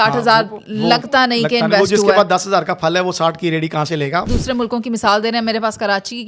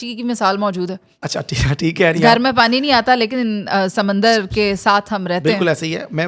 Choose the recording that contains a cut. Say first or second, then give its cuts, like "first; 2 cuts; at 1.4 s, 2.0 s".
first; 1 cut; at 4.2 s